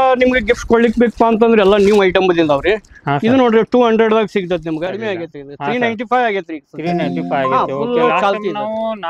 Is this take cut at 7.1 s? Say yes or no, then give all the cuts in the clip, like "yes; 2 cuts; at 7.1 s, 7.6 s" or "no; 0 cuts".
no; 1 cut; at 4.8 s